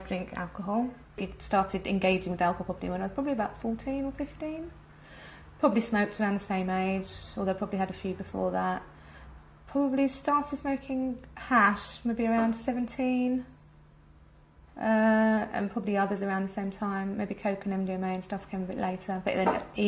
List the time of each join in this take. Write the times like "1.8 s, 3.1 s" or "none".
7.4 s

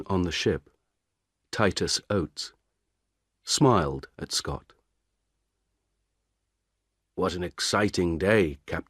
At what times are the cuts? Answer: 7.6 s

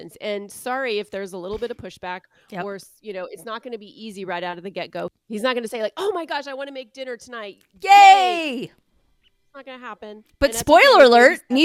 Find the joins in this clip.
none

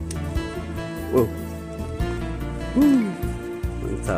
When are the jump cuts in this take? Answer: 3.1 s

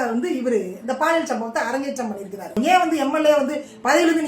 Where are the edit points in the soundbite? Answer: 2.5 s

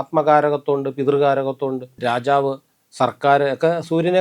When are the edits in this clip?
1.9 s

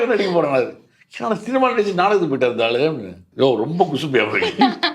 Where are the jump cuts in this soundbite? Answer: 3.2 s

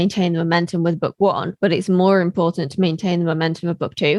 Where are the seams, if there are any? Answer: none

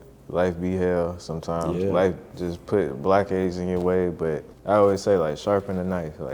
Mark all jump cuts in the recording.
4.5 s

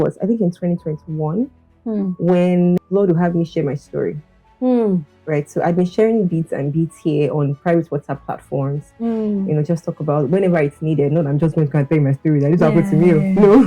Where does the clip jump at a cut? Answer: 2.8 s

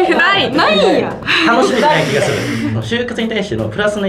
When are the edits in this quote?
1.2 s, 2.8 s

